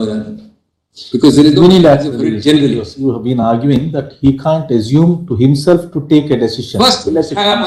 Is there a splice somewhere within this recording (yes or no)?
no